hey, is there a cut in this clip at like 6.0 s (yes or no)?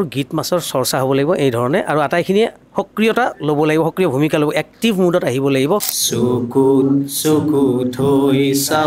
yes